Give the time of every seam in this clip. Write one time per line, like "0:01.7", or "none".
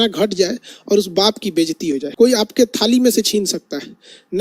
0:02.4